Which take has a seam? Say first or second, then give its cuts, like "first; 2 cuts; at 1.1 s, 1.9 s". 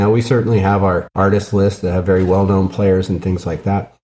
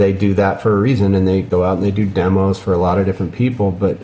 first; 1 cut; at 1.1 s